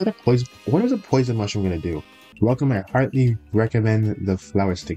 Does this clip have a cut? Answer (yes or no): no